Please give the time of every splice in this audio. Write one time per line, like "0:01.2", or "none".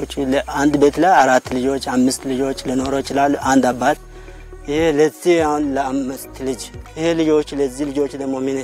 0:06.8